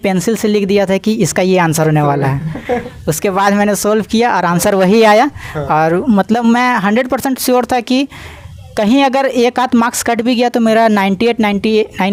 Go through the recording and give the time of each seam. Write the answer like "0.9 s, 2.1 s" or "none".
none